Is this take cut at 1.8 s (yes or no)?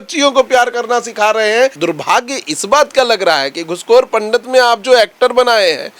yes